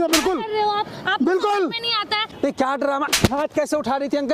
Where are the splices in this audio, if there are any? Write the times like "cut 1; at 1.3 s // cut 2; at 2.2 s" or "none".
cut 1; at 2.3 s

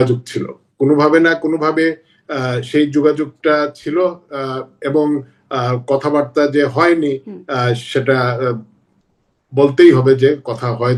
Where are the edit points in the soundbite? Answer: none

